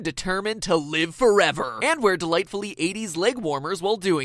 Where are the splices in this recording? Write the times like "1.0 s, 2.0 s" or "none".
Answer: none